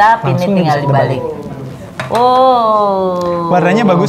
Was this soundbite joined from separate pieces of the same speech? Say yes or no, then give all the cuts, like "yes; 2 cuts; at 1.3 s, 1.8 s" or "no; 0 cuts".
no; 0 cuts